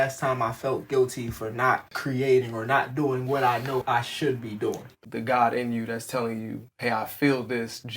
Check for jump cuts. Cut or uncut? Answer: cut